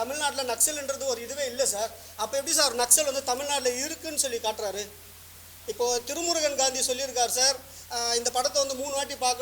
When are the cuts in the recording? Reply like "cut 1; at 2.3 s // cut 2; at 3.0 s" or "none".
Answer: none